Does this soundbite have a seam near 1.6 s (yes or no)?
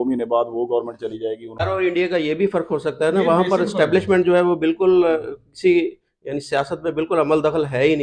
yes